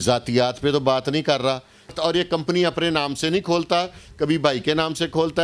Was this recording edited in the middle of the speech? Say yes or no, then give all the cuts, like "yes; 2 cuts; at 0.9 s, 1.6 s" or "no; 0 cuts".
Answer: yes; 1 cut; at 1.9 s